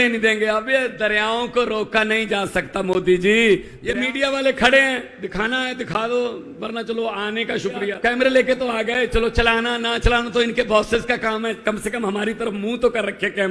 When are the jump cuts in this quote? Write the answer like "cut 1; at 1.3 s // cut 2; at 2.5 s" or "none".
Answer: cut 1; at 3.7 s // cut 2; at 7.9 s